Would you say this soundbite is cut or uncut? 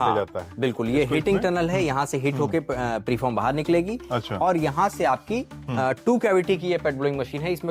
uncut